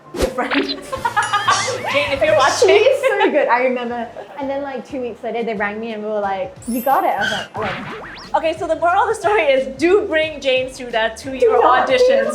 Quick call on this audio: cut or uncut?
cut